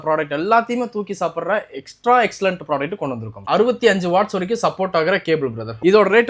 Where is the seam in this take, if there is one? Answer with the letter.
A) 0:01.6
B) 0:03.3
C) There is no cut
B